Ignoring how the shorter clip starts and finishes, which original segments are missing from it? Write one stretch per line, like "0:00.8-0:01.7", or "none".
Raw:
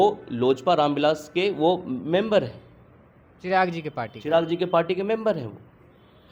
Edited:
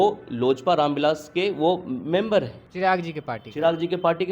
0:02.6-0:03.3